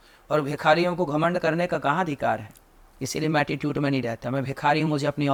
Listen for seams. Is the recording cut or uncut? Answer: uncut